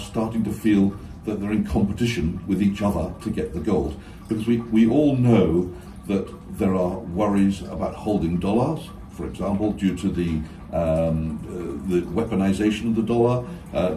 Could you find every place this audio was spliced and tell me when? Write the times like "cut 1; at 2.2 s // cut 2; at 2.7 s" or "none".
none